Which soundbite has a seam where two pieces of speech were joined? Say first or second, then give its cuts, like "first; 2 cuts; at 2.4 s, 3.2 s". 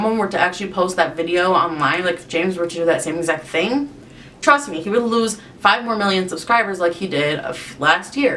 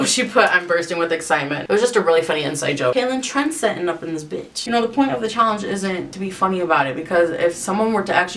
second; 3 cuts; at 2.9 s, 4.6 s, 6.1 s